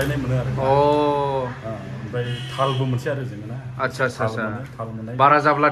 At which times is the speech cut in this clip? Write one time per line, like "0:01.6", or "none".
none